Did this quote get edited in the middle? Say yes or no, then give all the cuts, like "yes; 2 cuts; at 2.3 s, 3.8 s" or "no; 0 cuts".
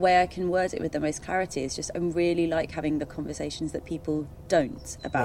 no; 0 cuts